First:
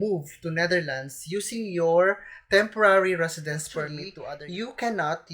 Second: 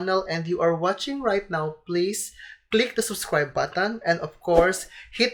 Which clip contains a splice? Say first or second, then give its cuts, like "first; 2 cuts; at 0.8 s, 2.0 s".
first; 1 cut; at 4.1 s